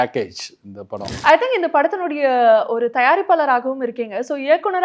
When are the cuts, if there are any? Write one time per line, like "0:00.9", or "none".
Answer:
0:01.0